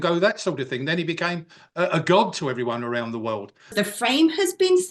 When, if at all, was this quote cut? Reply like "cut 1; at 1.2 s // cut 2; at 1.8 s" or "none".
cut 1; at 3.7 s